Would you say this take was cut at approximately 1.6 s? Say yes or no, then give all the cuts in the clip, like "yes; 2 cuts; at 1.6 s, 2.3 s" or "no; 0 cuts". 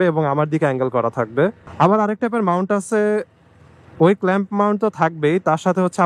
yes; 1 cut; at 1.6 s